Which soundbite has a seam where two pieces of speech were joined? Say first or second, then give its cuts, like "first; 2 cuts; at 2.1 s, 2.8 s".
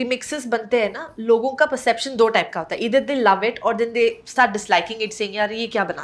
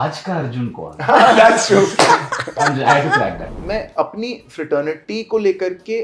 second; 1 cut; at 3.4 s